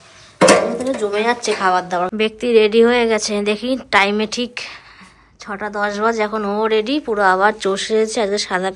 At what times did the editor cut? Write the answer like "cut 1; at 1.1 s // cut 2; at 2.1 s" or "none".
cut 1; at 2.1 s